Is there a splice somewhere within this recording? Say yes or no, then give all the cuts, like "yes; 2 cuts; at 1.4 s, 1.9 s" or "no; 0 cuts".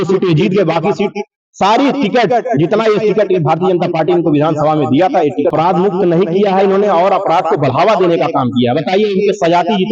yes; 1 cut; at 5.5 s